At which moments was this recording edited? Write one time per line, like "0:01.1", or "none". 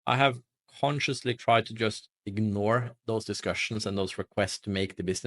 0:02.9